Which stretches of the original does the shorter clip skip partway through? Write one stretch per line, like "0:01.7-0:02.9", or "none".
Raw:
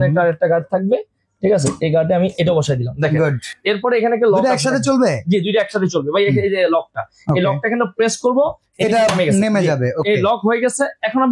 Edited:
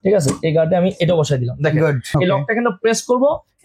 0:03.4-0:07.2